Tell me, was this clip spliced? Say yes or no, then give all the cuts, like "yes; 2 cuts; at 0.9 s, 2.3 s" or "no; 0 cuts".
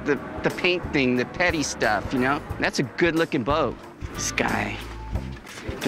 no; 0 cuts